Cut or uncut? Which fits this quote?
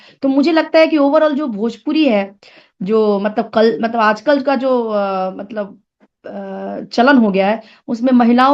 uncut